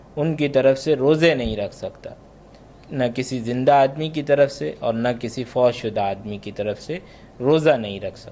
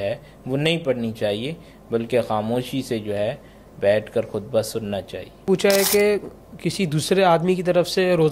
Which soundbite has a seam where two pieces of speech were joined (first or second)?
second